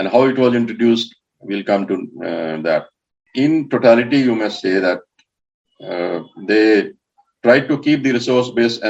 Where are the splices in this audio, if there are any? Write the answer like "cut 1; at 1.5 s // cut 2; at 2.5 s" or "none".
cut 1; at 3.2 s

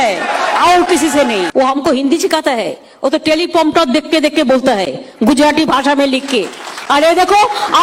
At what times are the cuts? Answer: cut 1; at 1.5 s

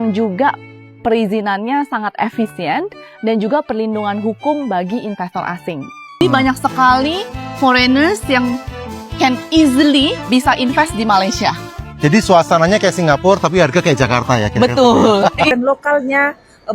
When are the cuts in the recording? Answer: cut 1; at 6.2 s // cut 2; at 15.5 s

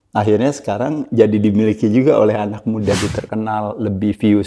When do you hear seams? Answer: cut 1; at 2.9 s

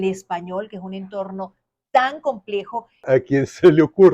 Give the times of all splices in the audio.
cut 1; at 3.0 s

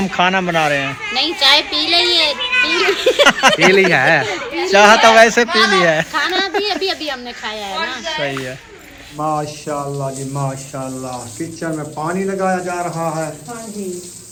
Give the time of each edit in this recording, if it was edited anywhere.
none

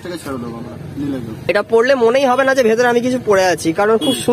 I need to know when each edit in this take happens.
cut 1; at 1.3 s

